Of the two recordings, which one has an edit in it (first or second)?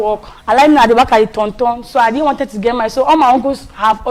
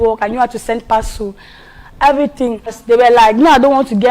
second